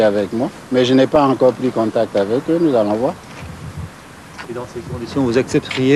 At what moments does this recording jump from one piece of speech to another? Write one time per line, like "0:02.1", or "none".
none

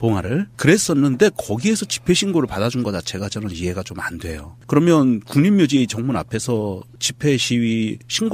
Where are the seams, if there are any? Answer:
0:01.1

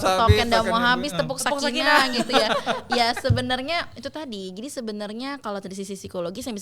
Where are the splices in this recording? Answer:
none

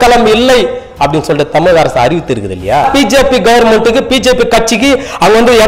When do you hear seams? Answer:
0:02.8

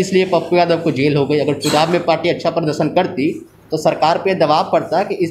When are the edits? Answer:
none

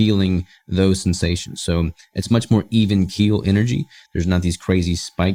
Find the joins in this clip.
none

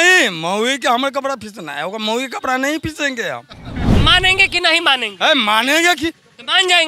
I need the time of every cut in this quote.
0:03.8

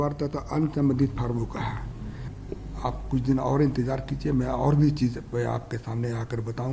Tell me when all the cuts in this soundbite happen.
0:02.3

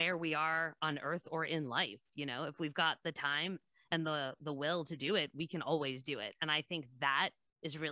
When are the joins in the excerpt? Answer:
none

